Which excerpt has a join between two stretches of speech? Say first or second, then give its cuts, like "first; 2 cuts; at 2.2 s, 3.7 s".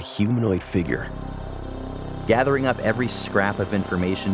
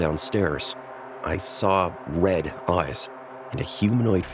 first; 1 cut; at 1.7 s